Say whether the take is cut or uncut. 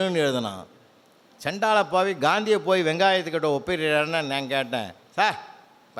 uncut